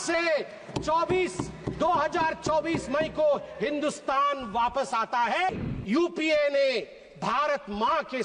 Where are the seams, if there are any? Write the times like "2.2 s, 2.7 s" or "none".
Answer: 5.5 s